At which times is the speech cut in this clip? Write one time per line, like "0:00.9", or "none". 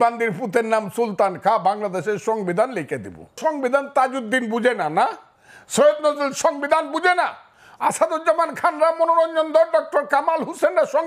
0:03.4